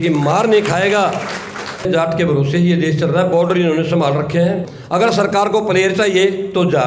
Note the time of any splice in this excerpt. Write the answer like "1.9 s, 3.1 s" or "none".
1.9 s, 4.7 s